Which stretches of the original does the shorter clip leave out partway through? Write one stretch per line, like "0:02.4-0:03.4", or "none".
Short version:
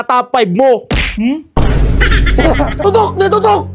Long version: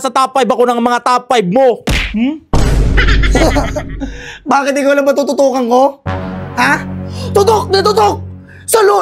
0:03.8-0:07.4